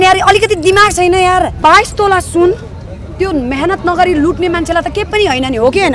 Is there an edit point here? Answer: yes; 1 cut; at 1.5 s

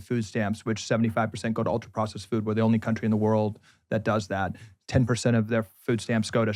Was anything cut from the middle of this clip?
no; 0 cuts

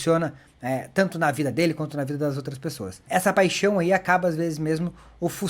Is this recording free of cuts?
no; 1 cut; at 2.9 s

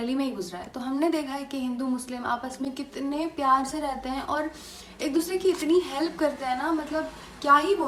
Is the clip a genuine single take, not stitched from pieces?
yes; 0 cuts

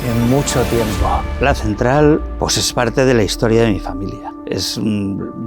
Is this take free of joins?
no; 3 cuts; at 1.3 s, 2.3 s, 4.3 s

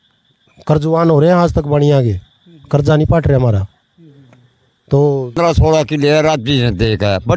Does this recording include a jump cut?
yes; 1 cut; at 5.3 s

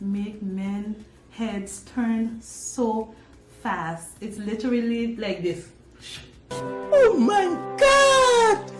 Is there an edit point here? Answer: no; 0 cuts

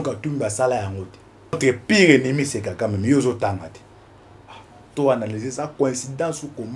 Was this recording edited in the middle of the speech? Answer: yes; 1 cut; at 1.6 s

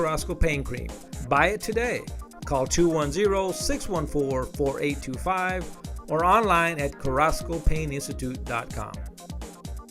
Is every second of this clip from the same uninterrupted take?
no; 1 cut; at 8.9 s

